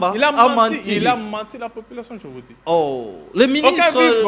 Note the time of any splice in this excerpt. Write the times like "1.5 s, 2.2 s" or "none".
none